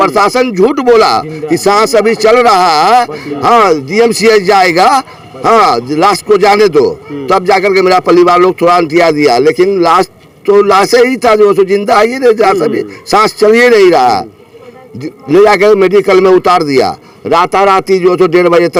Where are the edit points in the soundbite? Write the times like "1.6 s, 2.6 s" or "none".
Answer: none